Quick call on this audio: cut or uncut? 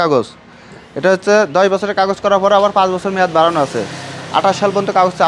uncut